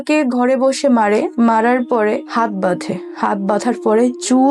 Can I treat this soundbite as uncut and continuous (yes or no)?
no